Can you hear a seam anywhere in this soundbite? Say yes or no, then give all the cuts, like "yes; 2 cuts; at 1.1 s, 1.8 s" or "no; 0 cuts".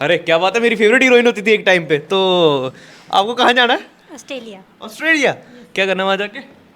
no; 0 cuts